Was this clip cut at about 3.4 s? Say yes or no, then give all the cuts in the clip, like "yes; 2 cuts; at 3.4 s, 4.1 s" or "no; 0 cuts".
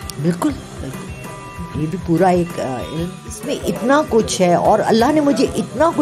yes; 1 cut; at 3.4 s